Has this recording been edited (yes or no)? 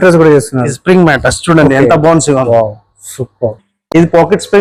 no